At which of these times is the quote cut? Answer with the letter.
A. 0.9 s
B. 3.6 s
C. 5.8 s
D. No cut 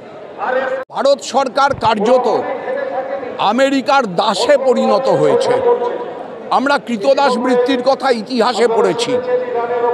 A